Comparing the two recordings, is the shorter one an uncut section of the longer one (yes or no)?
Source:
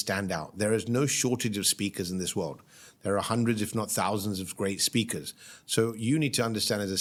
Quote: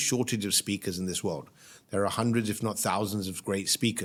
yes